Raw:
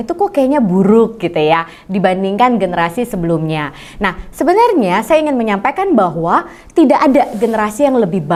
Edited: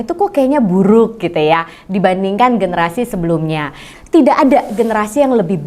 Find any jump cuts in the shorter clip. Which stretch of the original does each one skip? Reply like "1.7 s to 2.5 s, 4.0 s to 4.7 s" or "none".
3.9 s to 6.6 s